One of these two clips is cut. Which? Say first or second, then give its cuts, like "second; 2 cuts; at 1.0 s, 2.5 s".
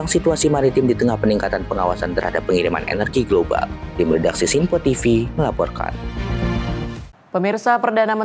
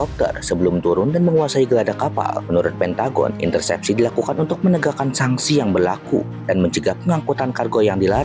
first; 1 cut; at 7.0 s